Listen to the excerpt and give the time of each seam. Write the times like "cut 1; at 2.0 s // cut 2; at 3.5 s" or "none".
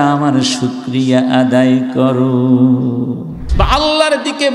cut 1; at 3.4 s